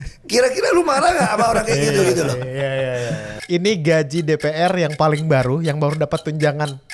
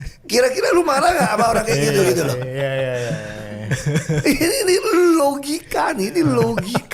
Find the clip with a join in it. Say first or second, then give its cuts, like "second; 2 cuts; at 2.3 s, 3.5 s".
first; 1 cut; at 3.3 s